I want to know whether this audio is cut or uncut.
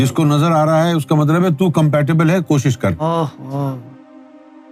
uncut